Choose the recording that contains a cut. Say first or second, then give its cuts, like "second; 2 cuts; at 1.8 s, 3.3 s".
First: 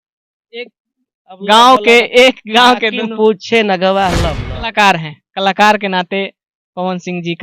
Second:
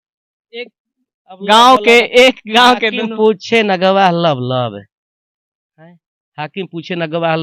first; 1 cut; at 4.4 s